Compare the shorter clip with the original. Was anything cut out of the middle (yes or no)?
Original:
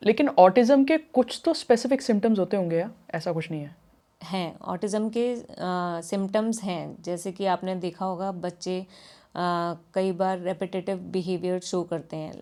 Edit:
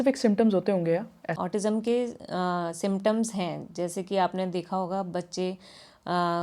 yes